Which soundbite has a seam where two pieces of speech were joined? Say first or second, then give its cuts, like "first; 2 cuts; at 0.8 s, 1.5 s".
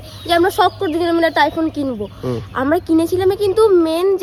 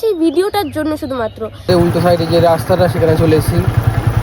second; 1 cut; at 1.7 s